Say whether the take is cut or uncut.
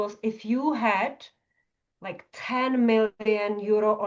uncut